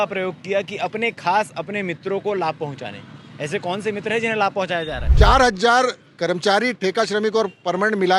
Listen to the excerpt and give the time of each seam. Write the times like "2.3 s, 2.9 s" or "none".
5.0 s